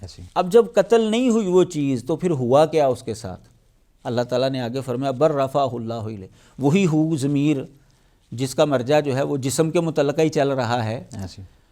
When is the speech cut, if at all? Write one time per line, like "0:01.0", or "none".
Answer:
none